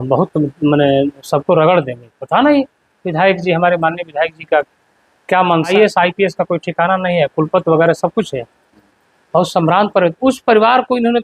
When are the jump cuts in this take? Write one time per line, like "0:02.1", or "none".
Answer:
0:05.7

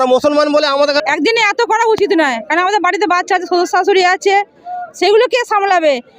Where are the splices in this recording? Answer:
0:01.0

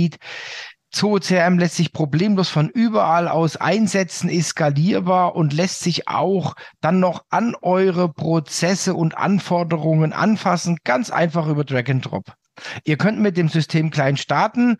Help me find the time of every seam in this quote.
none

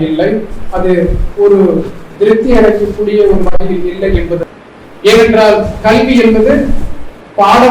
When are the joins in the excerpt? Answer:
0:04.4

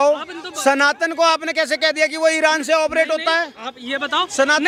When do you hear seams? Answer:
none

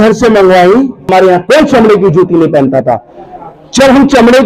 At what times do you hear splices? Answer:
0:01.0

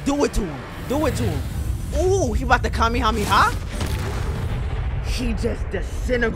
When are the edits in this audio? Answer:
none

